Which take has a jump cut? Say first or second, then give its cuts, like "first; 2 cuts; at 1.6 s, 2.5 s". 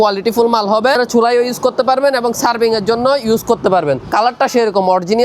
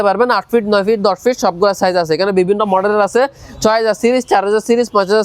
first; 2 cuts; at 1.0 s, 4.1 s